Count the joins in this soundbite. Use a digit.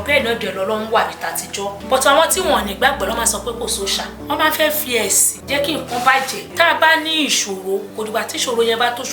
5